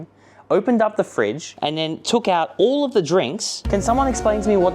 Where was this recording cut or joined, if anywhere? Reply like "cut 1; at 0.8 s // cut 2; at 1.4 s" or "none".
cut 1; at 1.5 s // cut 2; at 3.6 s